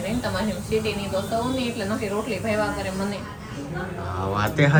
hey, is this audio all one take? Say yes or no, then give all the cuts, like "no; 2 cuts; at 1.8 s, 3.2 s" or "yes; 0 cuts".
yes; 0 cuts